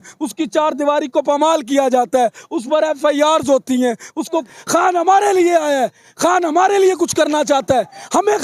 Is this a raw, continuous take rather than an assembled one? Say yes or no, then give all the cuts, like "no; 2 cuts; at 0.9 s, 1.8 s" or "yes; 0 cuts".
no; 1 cut; at 4.4 s